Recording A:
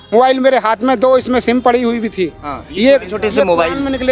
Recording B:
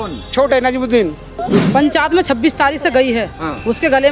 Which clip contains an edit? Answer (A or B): B